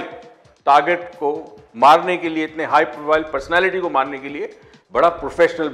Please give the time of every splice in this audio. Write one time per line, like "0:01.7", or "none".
none

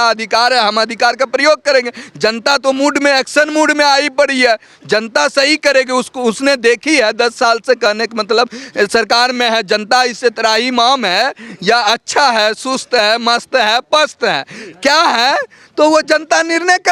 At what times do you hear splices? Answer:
none

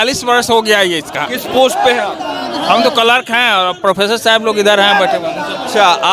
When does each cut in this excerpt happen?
none

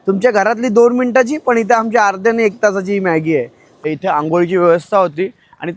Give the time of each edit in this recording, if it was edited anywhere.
0:03.8

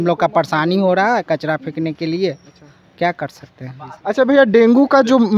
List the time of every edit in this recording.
none

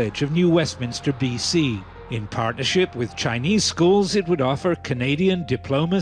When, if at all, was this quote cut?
0:03.1

